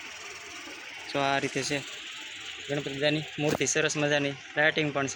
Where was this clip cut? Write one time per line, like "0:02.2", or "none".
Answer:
none